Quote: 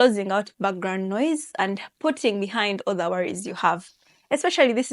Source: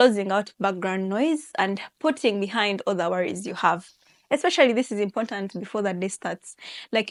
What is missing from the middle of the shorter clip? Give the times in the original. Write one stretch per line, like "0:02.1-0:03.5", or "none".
none